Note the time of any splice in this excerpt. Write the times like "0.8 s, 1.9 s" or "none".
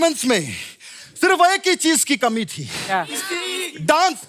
none

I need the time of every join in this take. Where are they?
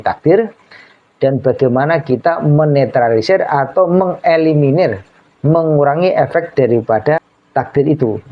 7.4 s

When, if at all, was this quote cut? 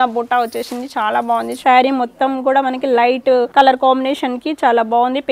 1.6 s, 3.5 s

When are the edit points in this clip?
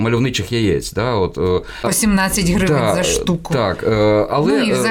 none

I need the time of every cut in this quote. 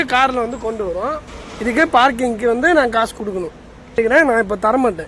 3.9 s

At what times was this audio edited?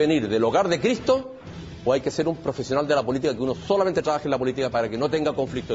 none

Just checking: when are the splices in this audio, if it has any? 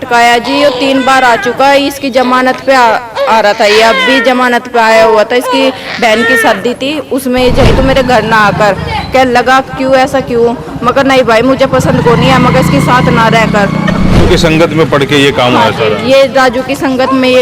7.7 s, 14.2 s

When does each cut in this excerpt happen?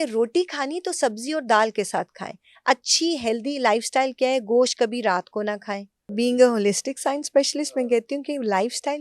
6.0 s

